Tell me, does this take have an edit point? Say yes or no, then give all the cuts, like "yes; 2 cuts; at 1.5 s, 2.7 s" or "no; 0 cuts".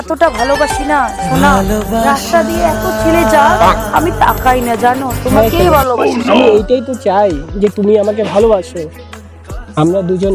no; 0 cuts